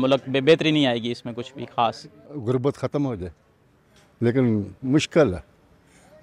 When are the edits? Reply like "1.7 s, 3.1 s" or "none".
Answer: 2.2 s